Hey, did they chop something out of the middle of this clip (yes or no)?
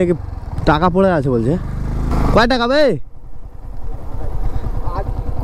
yes